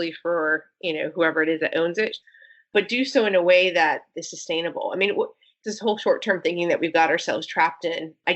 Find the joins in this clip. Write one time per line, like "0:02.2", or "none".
0:02.2
0:05.5